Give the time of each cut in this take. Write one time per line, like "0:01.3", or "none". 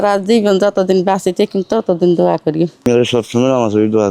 0:02.8